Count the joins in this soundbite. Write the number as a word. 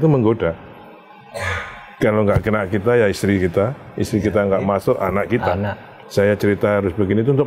one